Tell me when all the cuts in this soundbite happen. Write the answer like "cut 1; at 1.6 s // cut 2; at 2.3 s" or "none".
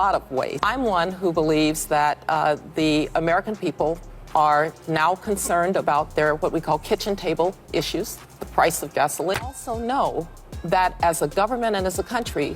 cut 1; at 9.4 s